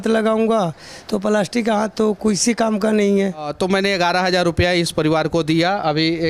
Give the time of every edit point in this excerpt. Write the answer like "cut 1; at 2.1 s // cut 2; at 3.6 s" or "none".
cut 1; at 3.5 s